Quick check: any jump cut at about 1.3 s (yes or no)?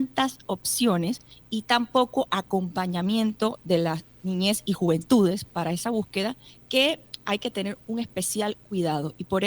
yes